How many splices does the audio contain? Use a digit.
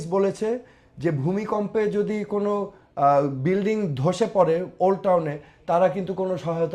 0